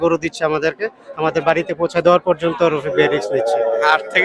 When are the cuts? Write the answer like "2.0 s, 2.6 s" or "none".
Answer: 1.0 s